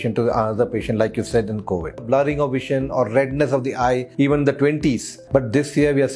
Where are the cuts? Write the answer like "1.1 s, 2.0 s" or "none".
2.0 s, 4.1 s, 5.1 s